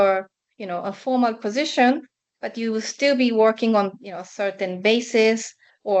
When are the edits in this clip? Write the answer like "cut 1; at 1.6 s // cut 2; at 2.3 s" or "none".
none